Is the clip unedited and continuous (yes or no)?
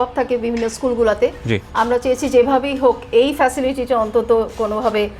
yes